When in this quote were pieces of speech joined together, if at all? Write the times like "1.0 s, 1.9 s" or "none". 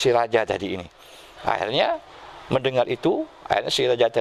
none